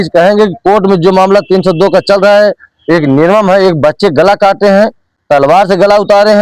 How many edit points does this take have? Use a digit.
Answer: 0